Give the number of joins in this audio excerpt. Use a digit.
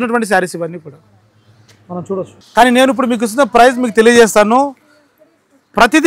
0